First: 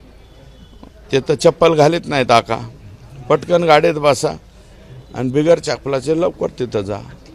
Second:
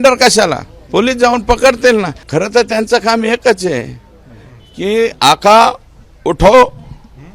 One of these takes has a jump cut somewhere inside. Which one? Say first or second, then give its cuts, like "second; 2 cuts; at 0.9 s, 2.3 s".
second; 1 cut; at 2.2 s